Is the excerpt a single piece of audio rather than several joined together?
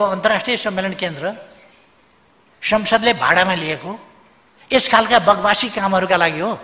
yes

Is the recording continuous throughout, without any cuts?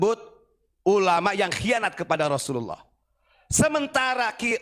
yes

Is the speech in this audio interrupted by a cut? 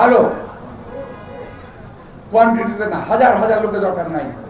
no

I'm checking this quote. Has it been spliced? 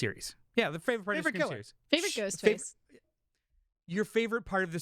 yes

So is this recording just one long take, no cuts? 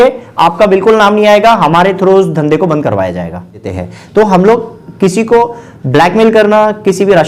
no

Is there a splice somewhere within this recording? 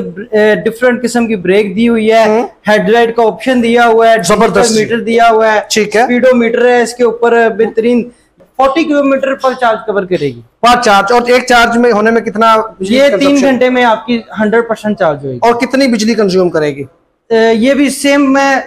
yes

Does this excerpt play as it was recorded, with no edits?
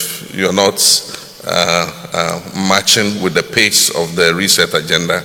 yes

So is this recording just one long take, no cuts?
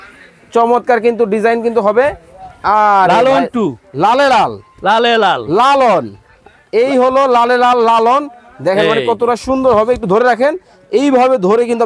yes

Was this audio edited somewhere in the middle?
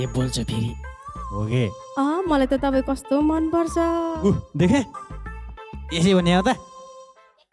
yes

